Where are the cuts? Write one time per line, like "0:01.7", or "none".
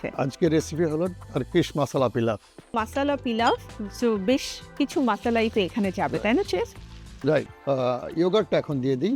0:02.7
0:07.5